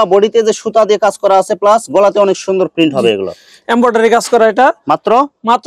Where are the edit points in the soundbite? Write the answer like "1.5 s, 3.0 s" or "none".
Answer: none